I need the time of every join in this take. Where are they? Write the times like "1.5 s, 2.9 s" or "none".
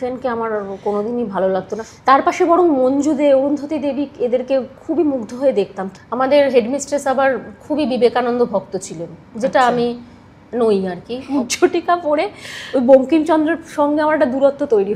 1.8 s, 5.8 s, 11.2 s